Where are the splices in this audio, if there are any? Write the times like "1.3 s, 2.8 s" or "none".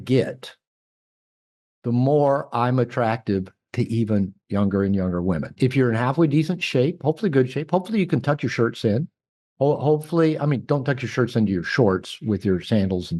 5.5 s